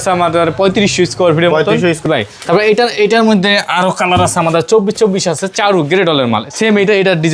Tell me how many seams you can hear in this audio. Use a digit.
1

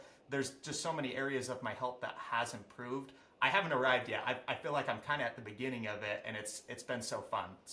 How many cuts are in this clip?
0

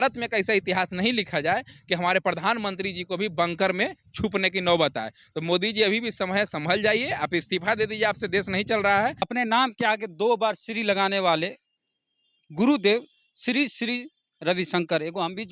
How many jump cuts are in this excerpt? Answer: 1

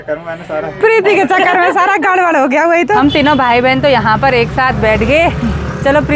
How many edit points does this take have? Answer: 1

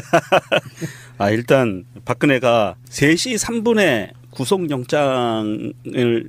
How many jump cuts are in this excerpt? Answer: 0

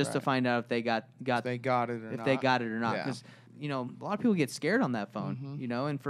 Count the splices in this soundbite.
1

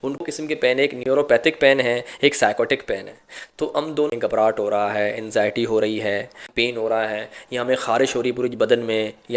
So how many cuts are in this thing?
3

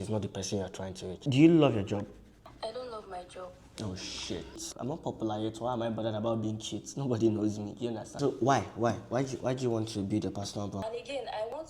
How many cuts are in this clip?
4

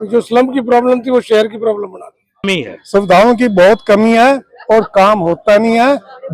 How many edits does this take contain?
1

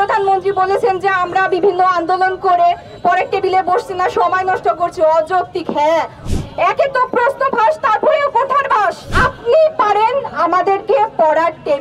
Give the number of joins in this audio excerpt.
2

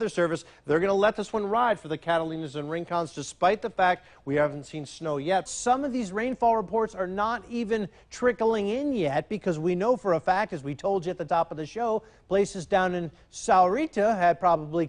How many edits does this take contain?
1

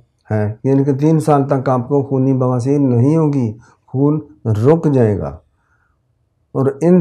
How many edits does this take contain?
0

